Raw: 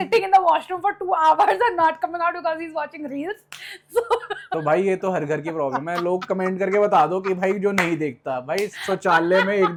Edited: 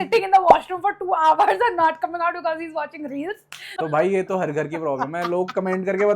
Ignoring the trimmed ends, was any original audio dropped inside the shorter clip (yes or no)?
yes